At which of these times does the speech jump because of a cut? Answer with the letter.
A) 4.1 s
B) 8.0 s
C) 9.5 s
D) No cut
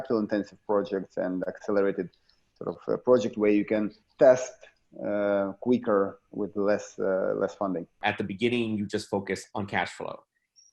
B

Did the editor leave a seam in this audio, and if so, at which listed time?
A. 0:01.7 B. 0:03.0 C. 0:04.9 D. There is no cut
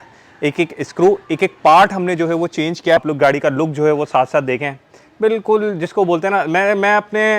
B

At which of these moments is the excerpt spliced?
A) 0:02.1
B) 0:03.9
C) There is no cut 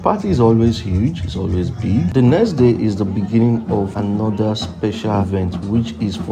A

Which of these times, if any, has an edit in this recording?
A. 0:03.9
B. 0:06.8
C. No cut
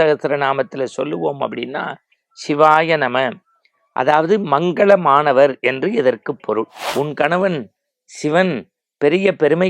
B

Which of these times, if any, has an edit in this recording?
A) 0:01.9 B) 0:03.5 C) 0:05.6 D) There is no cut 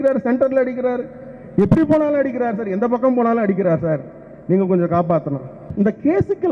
C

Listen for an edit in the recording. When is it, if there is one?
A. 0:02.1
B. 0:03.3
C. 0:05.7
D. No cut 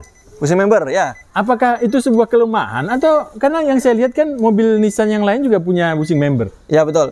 D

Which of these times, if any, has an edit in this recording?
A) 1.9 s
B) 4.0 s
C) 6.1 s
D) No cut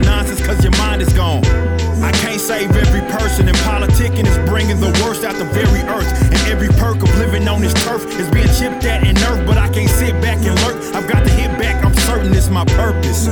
D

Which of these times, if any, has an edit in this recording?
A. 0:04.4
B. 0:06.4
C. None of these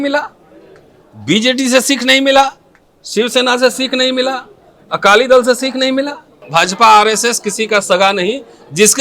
B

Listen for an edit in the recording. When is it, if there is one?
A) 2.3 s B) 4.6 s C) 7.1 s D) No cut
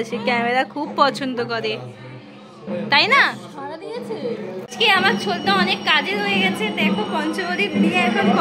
B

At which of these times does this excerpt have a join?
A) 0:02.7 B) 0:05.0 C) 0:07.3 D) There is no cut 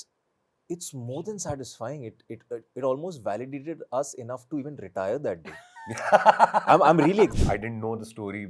C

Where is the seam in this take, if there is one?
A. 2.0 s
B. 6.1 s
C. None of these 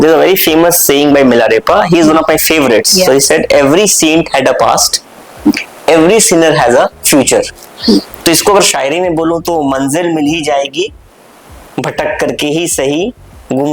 C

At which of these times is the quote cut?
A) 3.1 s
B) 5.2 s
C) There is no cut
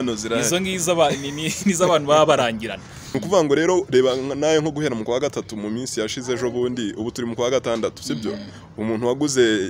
A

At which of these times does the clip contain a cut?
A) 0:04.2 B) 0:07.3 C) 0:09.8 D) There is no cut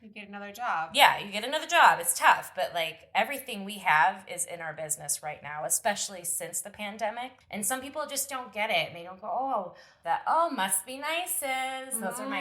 B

